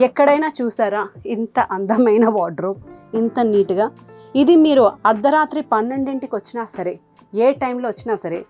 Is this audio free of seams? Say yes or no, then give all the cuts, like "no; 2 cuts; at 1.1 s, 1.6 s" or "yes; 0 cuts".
yes; 0 cuts